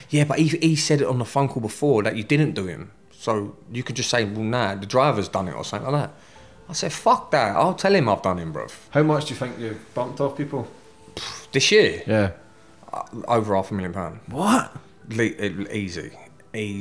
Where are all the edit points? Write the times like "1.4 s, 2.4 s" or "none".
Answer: 8.7 s